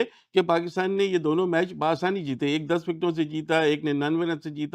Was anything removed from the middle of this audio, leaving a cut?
no; 0 cuts

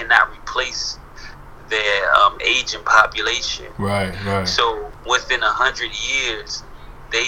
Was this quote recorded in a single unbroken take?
yes; 0 cuts

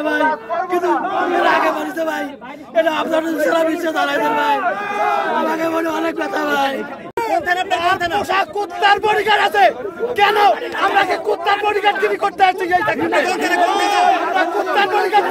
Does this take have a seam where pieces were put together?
yes; 1 cut; at 7.1 s

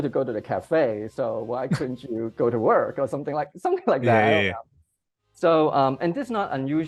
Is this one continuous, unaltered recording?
yes; 0 cuts

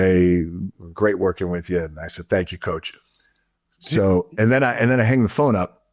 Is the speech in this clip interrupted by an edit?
no; 0 cuts

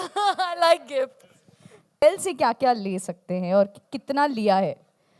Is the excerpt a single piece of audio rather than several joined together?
no; 1 cut; at 2.0 s

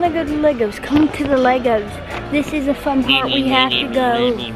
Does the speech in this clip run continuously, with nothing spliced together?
yes; 0 cuts

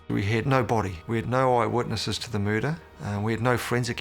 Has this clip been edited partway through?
yes; 2 cuts; at 1.0 s, 2.9 s

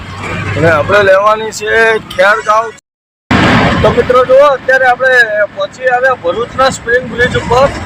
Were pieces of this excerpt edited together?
yes; 1 cut; at 2.8 s

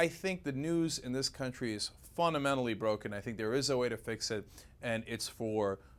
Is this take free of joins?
yes; 0 cuts

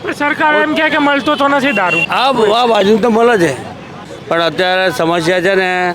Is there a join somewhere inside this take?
yes; 2 cuts; at 2.0 s, 4.1 s

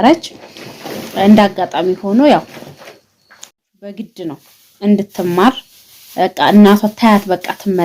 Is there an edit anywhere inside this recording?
yes; 1 cut; at 3.5 s

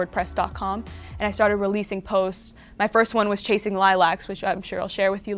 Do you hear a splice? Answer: no; 0 cuts

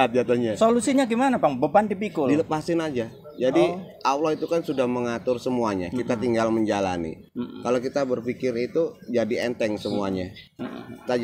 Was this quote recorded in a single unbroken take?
yes; 0 cuts

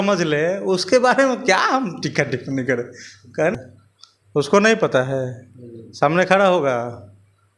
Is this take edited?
yes; 1 cut; at 3.5 s

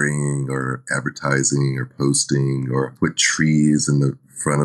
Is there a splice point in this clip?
yes; 1 cut; at 2.9 s

